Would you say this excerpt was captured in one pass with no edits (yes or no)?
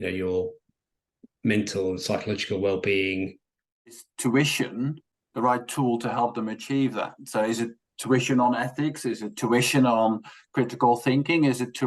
no